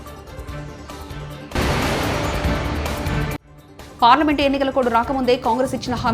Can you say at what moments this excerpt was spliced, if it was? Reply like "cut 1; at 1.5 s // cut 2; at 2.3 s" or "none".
cut 1; at 1.3 s // cut 2; at 3.5 s